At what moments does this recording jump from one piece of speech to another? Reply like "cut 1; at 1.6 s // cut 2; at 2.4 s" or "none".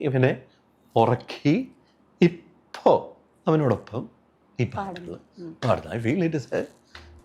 none